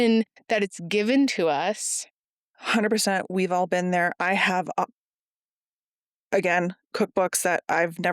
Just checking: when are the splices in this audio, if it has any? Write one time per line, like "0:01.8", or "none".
0:02.5